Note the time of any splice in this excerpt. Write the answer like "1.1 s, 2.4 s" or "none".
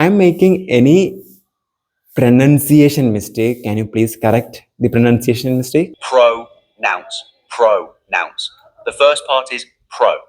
5.9 s

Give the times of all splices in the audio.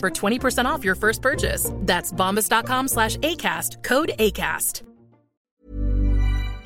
5.6 s

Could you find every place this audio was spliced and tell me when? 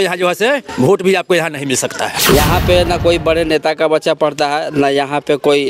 2.1 s

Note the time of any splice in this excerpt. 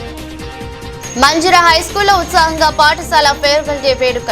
0.9 s

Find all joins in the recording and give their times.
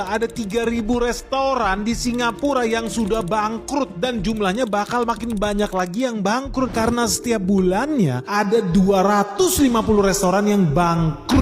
none

